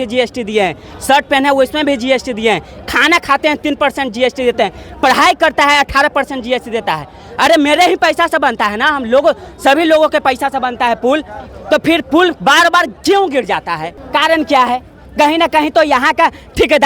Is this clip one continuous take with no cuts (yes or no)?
no